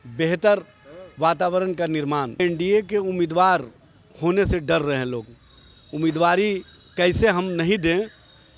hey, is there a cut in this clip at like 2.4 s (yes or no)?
yes